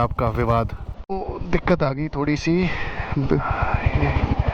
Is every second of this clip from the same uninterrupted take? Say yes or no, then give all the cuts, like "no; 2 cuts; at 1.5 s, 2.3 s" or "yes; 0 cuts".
no; 1 cut; at 1.1 s